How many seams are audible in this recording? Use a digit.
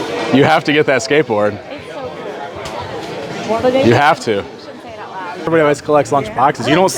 1